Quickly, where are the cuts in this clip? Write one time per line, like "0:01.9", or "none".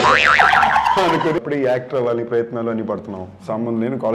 0:01.4